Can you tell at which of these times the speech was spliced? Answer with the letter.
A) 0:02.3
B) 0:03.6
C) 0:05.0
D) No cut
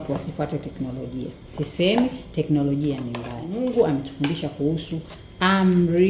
B